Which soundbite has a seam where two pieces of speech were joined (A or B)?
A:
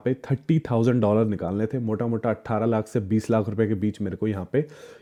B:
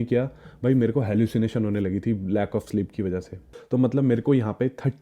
B